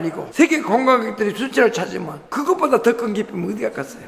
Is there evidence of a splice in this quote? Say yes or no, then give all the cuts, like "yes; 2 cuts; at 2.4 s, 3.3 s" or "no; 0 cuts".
no; 0 cuts